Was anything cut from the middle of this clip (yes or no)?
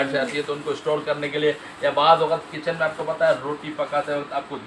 no